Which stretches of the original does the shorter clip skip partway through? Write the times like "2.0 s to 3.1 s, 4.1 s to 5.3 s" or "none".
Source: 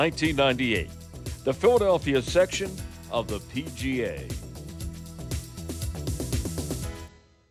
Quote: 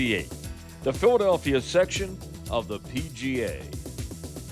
4.2 s to 6.0 s

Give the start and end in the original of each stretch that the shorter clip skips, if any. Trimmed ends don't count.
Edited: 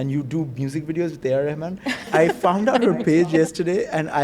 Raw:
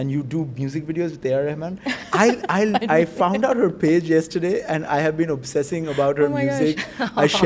2.1 s to 2.9 s

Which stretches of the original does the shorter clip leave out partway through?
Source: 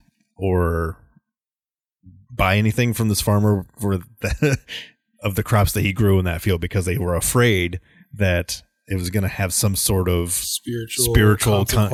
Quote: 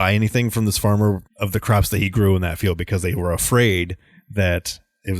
3.7 s to 5.1 s

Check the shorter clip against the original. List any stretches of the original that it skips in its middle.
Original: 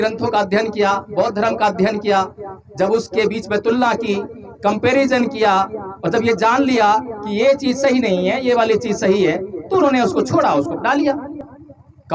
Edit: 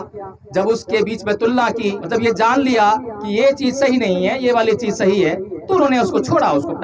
4.3 s to 6.0 s

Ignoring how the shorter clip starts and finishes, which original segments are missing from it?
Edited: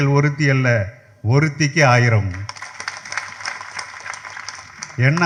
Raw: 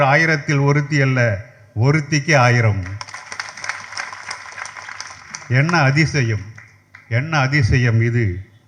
none

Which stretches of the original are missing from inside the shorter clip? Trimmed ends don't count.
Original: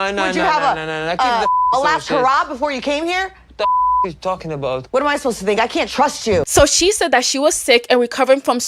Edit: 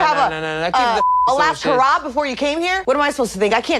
3.2 s to 4.9 s

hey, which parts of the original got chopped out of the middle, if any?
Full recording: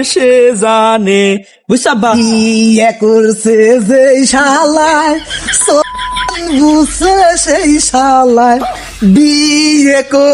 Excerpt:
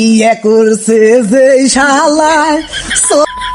none

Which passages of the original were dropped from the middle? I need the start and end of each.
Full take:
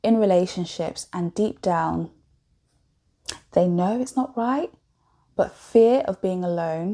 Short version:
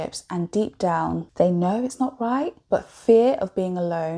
2.1 s to 3.4 s, 4.7 s to 5.2 s

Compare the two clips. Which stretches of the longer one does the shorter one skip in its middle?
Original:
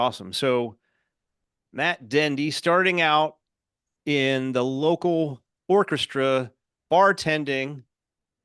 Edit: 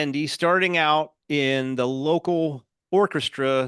3.4 s to 3.9 s

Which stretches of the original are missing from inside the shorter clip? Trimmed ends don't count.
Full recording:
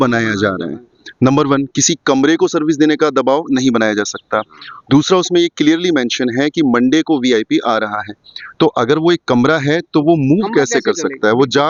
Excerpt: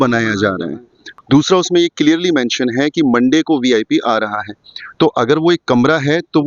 1.0 s to 4.6 s

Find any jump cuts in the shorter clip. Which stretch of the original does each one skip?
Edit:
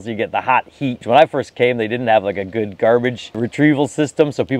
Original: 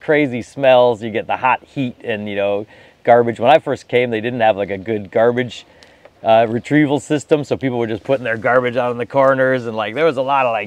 2.0 s to 3.3 s, 5.7 s to 6.5 s

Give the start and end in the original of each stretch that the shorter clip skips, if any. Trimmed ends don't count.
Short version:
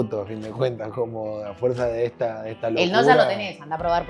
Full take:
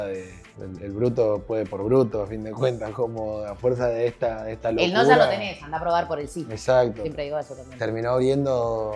none

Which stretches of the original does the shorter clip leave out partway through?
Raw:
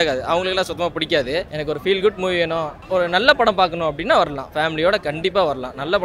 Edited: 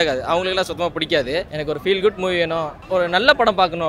none

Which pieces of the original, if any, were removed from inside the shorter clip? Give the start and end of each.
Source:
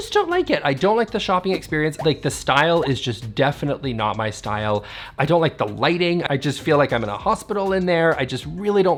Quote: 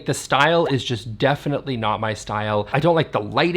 4.8 s to 5.1 s

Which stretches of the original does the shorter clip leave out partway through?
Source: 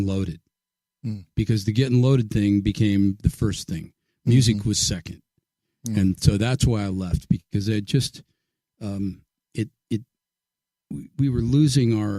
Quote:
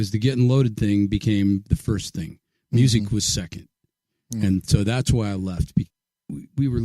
7.4 s to 10.5 s

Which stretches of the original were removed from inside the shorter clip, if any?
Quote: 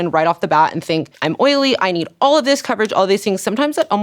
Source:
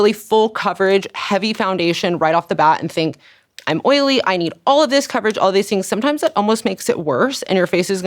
3.2 s to 3.6 s

